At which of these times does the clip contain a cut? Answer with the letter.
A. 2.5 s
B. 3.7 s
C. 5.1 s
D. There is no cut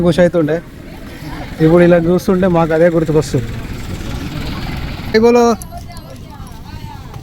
C